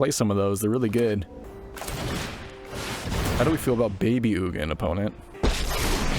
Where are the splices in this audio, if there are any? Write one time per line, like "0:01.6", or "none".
0:01.4
0:05.3